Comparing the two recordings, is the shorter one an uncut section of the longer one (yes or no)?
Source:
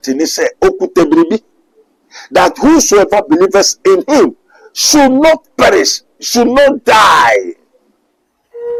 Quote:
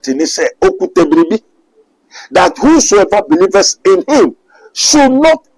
yes